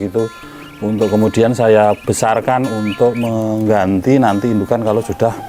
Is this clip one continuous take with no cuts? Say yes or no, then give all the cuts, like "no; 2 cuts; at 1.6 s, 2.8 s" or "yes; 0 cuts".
yes; 0 cuts